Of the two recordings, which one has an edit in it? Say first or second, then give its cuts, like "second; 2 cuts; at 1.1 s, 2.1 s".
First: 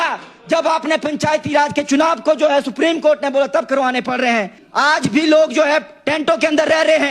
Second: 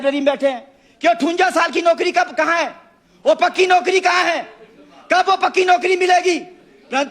first; 1 cut; at 4.6 s